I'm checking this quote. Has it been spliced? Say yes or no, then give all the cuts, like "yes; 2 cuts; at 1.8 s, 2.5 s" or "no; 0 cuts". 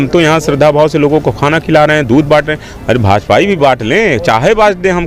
no; 0 cuts